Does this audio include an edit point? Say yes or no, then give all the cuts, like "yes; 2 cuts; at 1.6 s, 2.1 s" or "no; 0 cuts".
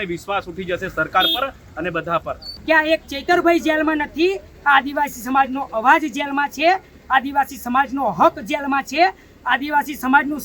yes; 1 cut; at 2.5 s